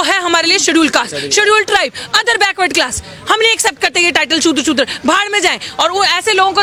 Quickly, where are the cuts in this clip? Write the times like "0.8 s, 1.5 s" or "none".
none